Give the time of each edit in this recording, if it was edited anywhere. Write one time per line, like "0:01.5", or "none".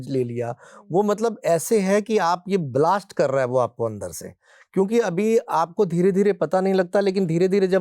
none